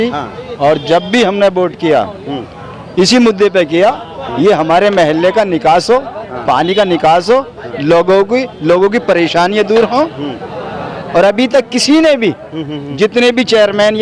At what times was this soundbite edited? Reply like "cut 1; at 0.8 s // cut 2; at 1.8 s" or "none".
none